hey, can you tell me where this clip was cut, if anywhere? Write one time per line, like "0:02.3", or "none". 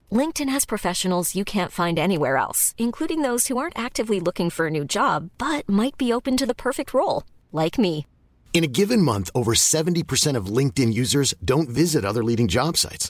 none